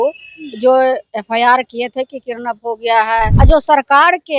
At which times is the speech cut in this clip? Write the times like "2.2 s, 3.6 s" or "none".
3.3 s